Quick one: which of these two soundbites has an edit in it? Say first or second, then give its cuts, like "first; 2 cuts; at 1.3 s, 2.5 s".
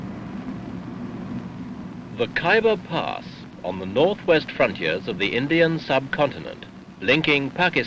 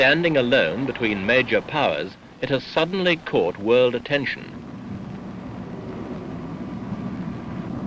first; 1 cut; at 2.3 s